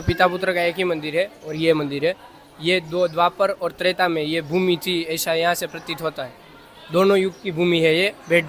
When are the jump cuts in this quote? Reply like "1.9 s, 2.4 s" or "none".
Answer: none